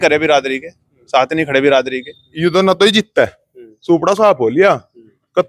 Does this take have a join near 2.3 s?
yes; 1 cut; at 2.3 s

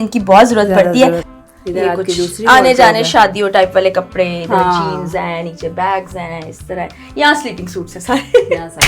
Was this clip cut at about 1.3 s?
yes; 1 cut; at 1.3 s

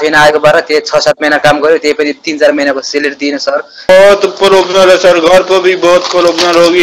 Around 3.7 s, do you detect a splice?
yes; 1 cut; at 3.7 s

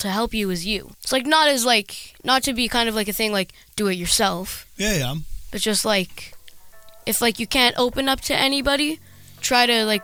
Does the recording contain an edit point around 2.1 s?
no; 0 cuts

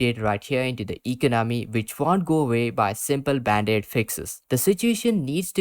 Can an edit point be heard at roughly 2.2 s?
no; 1 cut; at 4.4 s

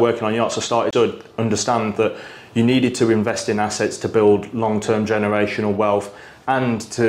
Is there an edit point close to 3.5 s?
no; 1 cut; at 0.9 s

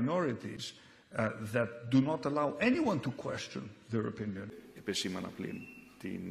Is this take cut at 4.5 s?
yes; 1 cut; at 4.5 s

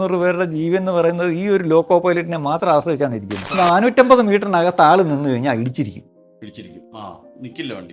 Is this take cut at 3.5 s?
yes; 1 cut; at 3.5 s

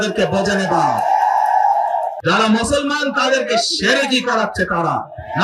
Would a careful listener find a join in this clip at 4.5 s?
no; 1 cut; at 2.1 s

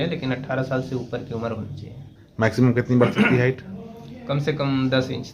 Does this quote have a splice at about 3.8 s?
no; 1 cut; at 2.2 s

